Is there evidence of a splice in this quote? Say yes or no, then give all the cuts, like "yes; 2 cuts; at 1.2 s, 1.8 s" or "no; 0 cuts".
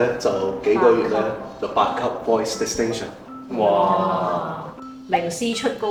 no; 0 cuts